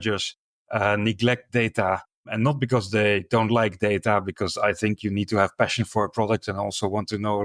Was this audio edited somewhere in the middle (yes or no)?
yes